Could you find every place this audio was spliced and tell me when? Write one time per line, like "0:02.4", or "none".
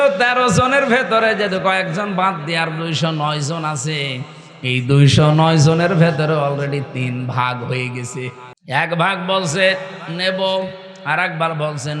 0:08.5